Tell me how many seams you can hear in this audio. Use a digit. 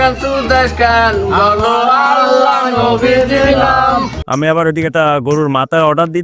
1